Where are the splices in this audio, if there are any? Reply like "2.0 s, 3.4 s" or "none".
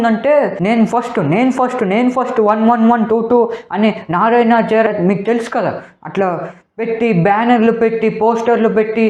none

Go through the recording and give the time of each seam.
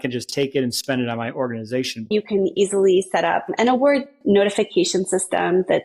2.1 s

